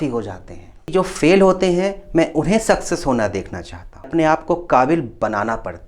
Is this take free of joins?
no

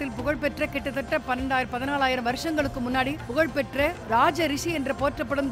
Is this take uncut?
no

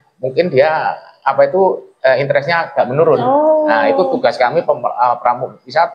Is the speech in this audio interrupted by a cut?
no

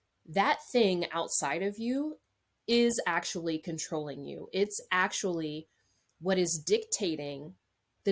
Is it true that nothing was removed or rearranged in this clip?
yes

